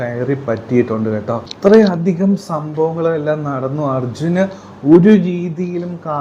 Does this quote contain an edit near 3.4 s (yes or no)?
no